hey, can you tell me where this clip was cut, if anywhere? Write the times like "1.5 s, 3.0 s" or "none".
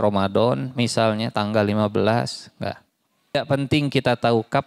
3.3 s